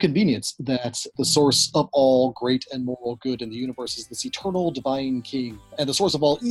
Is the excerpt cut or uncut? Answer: cut